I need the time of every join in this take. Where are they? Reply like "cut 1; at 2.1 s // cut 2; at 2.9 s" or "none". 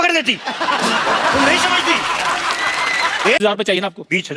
cut 1; at 3.4 s